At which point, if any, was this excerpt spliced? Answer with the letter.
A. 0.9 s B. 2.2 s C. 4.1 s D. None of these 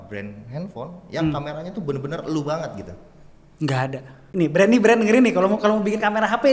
C